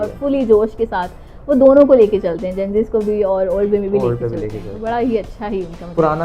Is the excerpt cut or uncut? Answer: uncut